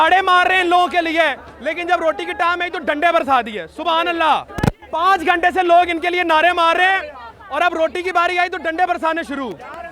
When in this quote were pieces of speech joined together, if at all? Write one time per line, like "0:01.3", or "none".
0:04.5